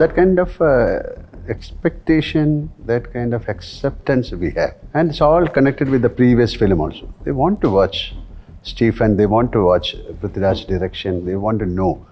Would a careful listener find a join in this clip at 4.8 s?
yes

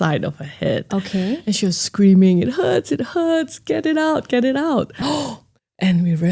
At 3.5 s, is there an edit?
no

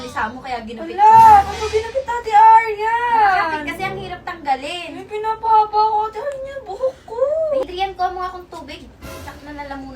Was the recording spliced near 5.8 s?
no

